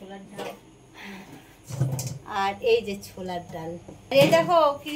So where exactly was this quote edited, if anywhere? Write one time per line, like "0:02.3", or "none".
none